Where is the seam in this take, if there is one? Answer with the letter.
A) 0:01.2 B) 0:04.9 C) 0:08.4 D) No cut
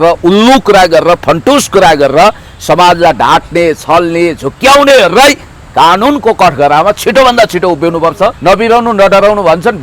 C